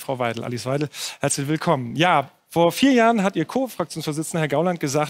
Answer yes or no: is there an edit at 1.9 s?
yes